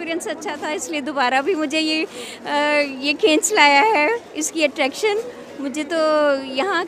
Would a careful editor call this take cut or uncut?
uncut